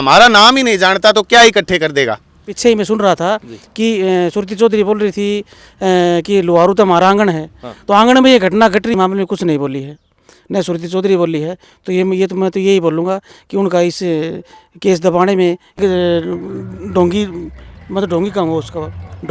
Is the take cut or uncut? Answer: cut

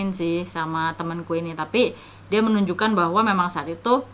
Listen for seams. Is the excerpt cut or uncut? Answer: uncut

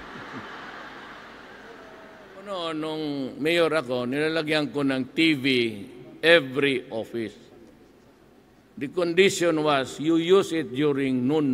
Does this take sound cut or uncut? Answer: cut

